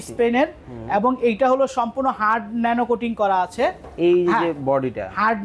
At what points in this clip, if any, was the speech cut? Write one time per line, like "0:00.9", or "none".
none